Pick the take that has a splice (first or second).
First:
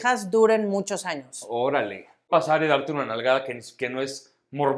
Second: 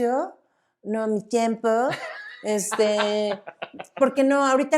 first